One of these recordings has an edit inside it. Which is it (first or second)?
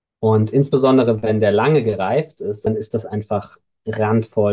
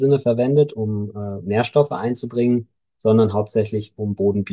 first